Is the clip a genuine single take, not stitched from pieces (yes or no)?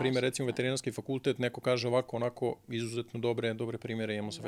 yes